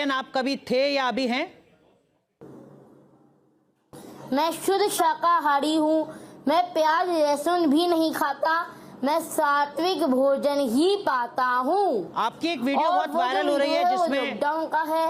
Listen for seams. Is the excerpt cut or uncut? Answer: uncut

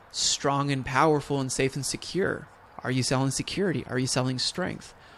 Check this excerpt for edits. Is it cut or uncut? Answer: uncut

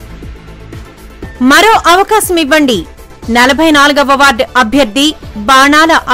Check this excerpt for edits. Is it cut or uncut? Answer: uncut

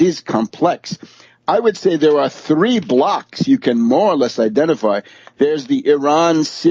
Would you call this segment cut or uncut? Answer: cut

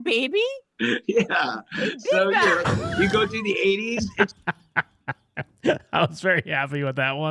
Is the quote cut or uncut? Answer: uncut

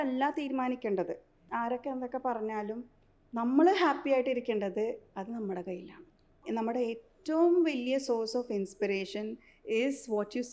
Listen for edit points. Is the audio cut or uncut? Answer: cut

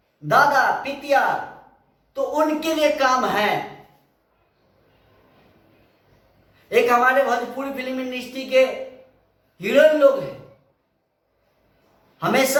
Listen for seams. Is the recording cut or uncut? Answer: uncut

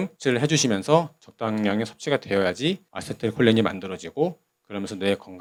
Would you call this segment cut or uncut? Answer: uncut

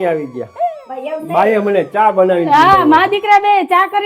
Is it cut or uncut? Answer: uncut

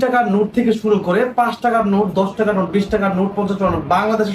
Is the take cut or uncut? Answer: uncut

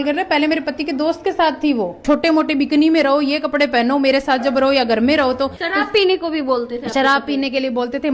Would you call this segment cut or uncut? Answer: cut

